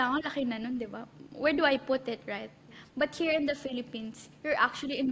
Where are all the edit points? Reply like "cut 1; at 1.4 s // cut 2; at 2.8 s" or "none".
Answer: cut 1; at 2.7 s